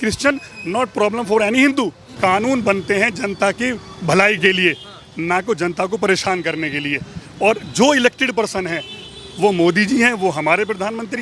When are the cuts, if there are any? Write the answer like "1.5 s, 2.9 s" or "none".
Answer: 2.0 s